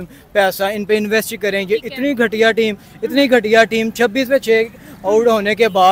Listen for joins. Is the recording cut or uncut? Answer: uncut